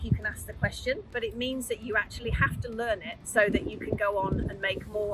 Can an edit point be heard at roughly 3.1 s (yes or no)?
yes